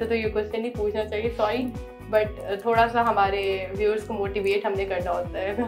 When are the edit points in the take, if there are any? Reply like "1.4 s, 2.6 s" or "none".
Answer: none